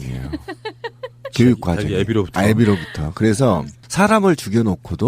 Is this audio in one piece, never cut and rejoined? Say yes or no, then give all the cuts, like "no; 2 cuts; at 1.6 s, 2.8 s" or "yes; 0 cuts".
no; 1 cut; at 3.8 s